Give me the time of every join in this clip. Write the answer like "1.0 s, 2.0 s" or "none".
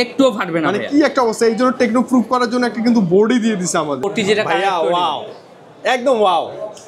4.1 s